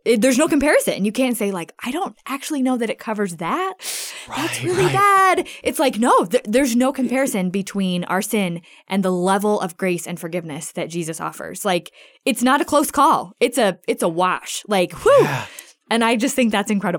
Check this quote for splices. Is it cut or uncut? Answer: cut